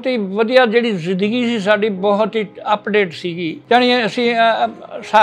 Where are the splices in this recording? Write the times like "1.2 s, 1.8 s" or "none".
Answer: 3.6 s